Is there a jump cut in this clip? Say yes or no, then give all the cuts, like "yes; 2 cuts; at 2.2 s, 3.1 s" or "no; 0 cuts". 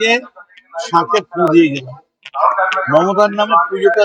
no; 0 cuts